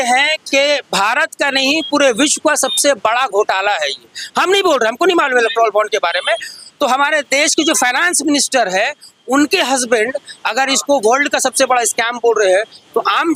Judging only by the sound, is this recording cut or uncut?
uncut